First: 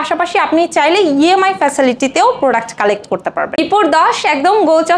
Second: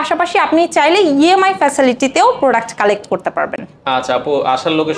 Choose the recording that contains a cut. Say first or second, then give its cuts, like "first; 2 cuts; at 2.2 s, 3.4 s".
first; 1 cut; at 3.6 s